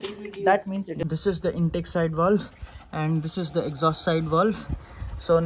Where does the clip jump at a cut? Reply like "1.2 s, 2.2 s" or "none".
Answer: 1.0 s